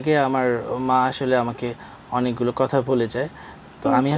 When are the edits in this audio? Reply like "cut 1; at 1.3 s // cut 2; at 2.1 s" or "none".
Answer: none